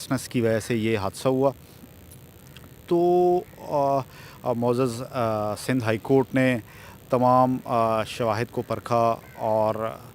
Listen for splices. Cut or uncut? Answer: uncut